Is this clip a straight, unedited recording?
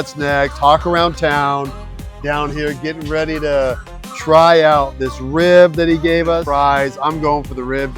no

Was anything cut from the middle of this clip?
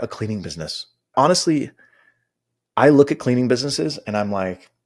yes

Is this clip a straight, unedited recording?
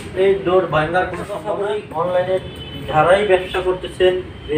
no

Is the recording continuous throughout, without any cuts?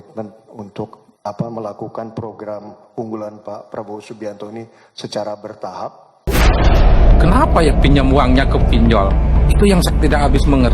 no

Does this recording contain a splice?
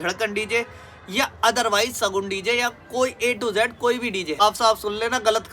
yes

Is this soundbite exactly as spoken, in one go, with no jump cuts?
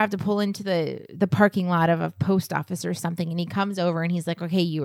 yes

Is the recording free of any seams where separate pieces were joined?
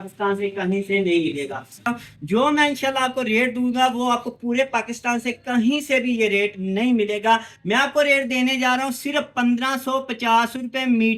no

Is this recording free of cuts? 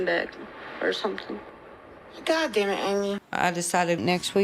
no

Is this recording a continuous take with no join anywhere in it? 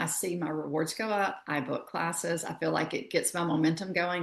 no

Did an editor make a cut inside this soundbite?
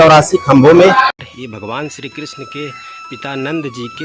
yes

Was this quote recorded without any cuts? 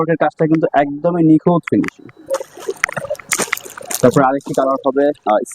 yes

